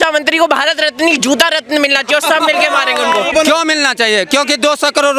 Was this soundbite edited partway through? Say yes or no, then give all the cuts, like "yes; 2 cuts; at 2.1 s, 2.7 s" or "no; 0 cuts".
yes; 1 cut; at 3.3 s